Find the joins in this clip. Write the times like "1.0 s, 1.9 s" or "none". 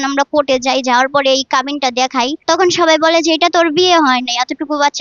2.4 s